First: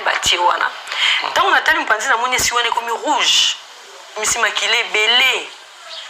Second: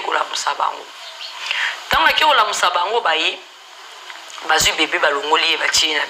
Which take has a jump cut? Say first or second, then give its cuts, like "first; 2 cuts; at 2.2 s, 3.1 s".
first; 1 cut; at 4.1 s